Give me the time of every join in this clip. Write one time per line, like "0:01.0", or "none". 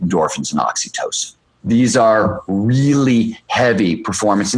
0:01.5